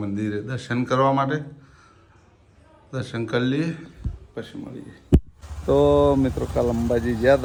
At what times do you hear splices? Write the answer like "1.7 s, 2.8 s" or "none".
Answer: none